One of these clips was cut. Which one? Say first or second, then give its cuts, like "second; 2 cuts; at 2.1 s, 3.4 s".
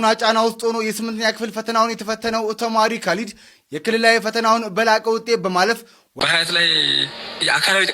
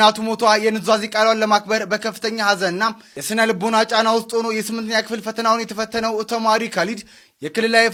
first; 1 cut; at 6.0 s